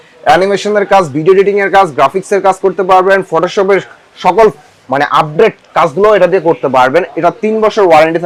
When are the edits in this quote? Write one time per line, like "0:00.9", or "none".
none